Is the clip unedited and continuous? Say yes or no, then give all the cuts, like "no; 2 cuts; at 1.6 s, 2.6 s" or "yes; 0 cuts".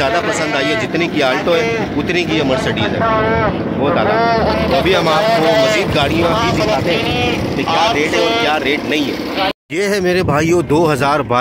yes; 0 cuts